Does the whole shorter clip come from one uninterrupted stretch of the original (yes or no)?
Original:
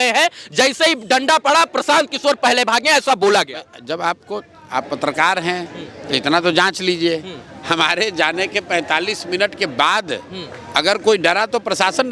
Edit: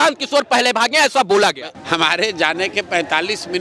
no